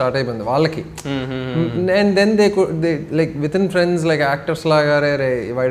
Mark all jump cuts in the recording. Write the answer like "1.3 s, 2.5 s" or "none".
none